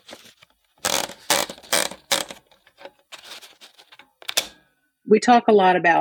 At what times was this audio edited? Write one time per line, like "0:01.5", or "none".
0:05.0